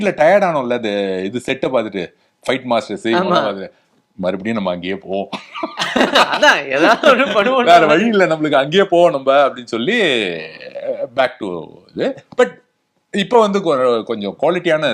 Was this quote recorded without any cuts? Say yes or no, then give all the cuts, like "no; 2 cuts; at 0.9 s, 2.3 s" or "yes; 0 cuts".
yes; 0 cuts